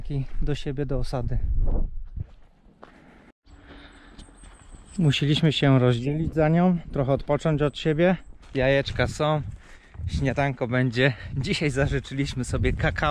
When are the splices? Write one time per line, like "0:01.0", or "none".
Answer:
0:03.4
0:08.4